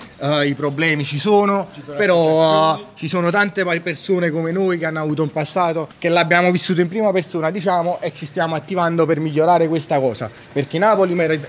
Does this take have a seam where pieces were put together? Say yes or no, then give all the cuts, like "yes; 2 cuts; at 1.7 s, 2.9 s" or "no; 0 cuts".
no; 0 cuts